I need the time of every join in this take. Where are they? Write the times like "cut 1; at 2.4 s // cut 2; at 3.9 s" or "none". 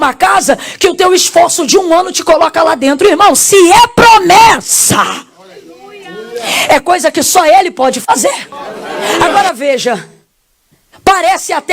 cut 1; at 9.2 s